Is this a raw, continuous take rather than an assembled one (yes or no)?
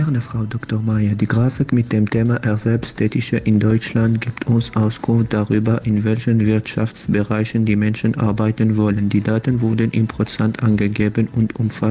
yes